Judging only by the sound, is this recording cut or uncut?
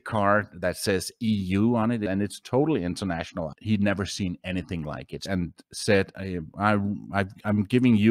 cut